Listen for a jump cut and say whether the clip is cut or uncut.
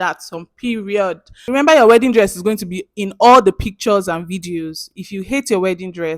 cut